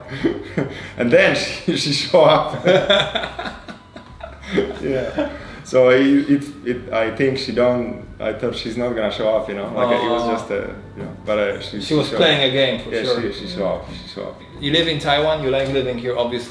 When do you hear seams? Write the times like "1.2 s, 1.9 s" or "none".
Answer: none

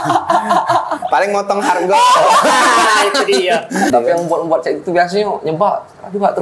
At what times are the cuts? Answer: 3.9 s

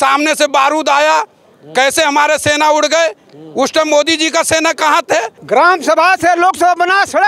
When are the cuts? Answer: 5.4 s

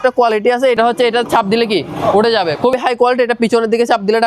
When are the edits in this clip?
0.8 s, 2.7 s

